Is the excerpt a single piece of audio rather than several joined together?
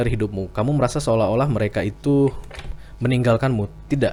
yes; 0 cuts

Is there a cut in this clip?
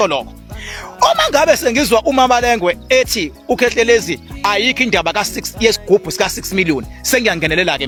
no; 0 cuts

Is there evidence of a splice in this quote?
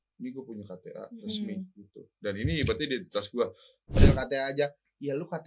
yes; 1 cut; at 4.0 s

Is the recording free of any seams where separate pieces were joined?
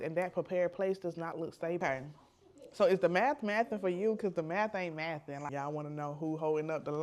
no; 2 cuts; at 1.8 s, 5.4 s

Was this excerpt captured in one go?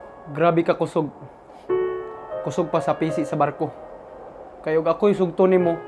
yes; 0 cuts

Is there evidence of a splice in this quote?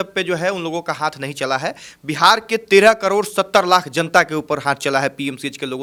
no; 0 cuts

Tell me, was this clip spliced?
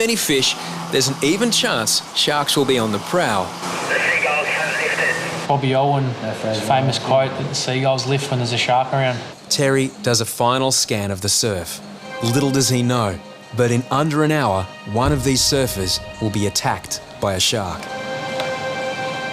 yes; 7 cuts; at 3.7 s, 5.4 s, 9.3 s, 12.1 s, 14.8 s, 16.0 s, 17.9 s

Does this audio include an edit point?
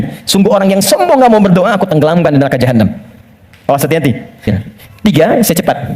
yes; 1 cut; at 4.5 s

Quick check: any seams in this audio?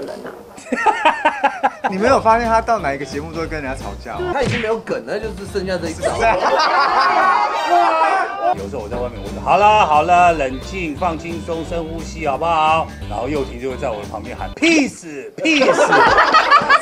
yes; 3 cuts; at 1.9 s, 4.3 s, 8.5 s

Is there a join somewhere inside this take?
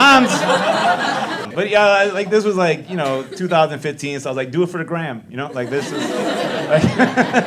yes; 1 cut; at 1.4 s

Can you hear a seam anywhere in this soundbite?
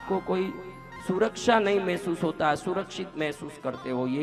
no; 0 cuts

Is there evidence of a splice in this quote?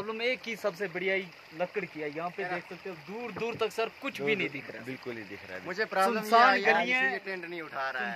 no; 0 cuts

